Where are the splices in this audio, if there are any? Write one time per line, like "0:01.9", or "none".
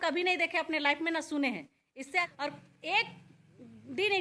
0:02.3

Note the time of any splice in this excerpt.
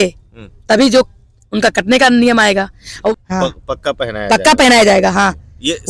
0:03.1

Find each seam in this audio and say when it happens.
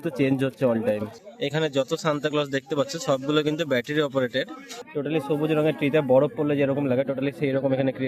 0:01.1
0:04.8

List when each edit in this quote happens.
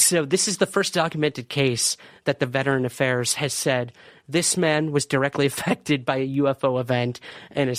none

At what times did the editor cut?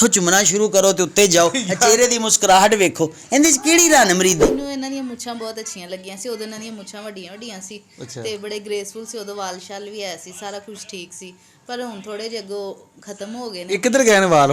0:04.4

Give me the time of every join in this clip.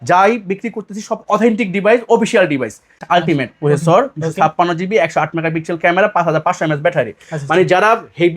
0:03.0

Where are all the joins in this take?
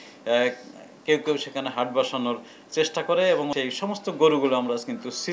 0:03.5

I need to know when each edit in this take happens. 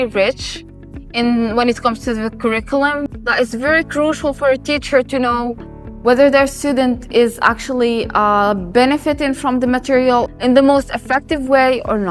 0:03.1

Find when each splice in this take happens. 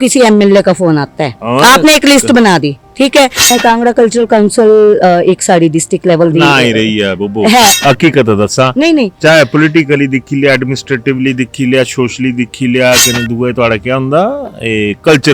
0:03.5

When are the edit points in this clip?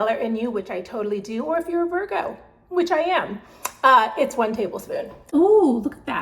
0:05.2

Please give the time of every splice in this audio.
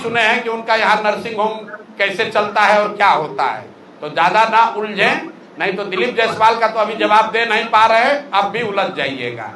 none

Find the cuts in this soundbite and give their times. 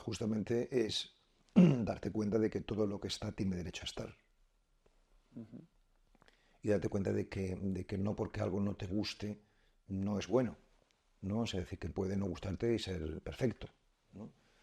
none

